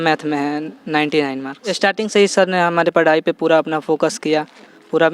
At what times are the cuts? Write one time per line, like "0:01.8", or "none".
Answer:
0:01.6